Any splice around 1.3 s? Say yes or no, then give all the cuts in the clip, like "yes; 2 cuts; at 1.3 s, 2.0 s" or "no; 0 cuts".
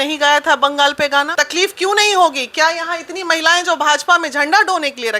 yes; 1 cut; at 1.3 s